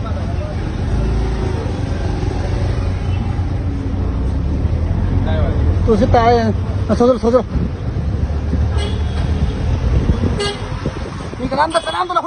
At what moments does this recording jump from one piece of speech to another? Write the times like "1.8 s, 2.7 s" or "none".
none